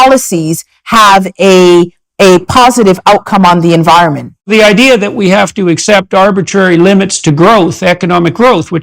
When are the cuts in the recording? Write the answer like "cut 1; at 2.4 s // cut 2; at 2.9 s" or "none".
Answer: cut 1; at 4.5 s